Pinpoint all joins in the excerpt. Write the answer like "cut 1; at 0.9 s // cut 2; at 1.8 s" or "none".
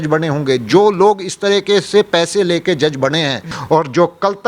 cut 1; at 3.4 s